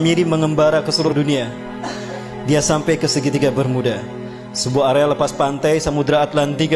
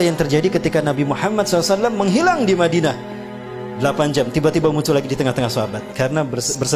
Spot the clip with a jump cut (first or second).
first